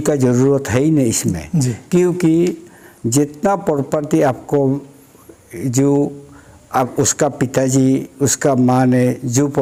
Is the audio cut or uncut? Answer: uncut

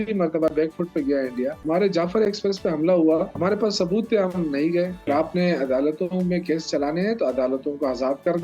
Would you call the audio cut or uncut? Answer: cut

